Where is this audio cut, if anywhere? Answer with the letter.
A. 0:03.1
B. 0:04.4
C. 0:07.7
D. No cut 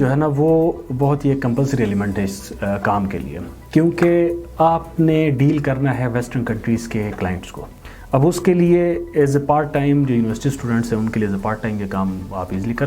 D